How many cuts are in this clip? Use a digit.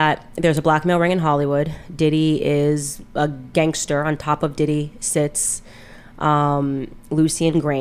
0